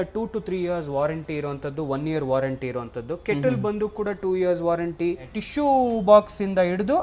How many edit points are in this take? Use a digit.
1